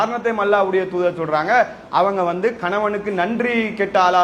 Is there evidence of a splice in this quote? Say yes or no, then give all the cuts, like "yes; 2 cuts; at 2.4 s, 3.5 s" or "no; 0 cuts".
no; 0 cuts